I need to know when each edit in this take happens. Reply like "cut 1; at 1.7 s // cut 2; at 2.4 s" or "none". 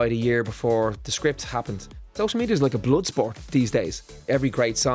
cut 1; at 2.2 s // cut 2; at 4.1 s